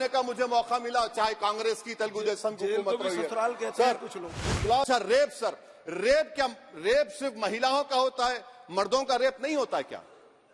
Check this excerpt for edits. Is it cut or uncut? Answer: cut